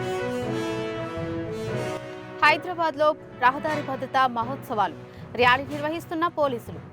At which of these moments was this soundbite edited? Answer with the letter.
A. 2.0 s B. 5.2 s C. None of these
A